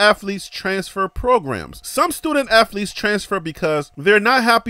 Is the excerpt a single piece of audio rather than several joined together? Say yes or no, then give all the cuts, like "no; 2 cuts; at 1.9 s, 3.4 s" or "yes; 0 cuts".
yes; 0 cuts